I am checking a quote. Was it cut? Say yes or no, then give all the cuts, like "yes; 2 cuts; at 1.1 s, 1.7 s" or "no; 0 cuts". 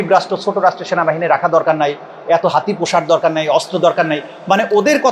no; 0 cuts